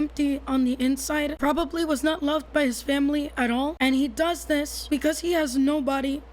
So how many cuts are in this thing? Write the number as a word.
three